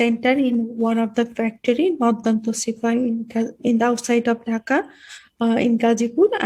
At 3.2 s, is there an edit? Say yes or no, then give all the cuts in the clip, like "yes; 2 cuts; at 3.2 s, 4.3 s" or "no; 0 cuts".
no; 0 cuts